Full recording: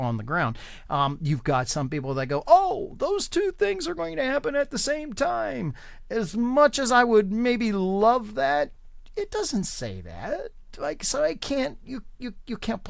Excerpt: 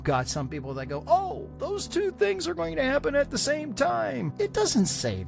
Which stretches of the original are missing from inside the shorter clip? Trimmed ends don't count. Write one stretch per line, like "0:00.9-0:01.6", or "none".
0:05.6-0:09.0